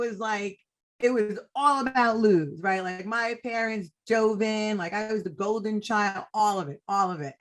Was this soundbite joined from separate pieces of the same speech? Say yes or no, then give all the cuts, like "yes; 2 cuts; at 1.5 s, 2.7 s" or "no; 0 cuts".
no; 0 cuts